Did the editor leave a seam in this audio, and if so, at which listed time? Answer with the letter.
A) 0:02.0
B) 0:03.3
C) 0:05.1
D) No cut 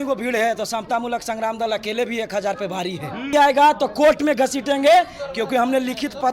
B